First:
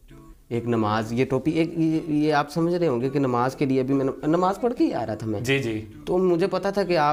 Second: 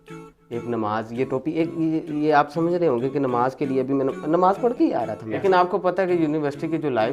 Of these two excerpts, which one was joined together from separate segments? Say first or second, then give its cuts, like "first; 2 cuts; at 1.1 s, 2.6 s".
second; 1 cut; at 5.4 s